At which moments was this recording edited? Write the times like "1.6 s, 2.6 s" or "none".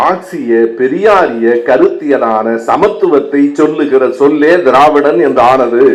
none